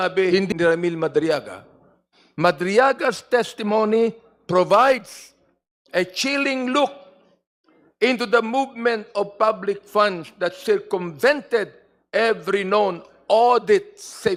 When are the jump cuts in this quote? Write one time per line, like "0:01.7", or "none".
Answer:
none